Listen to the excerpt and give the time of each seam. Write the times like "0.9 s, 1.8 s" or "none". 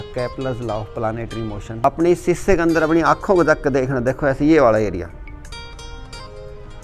1.8 s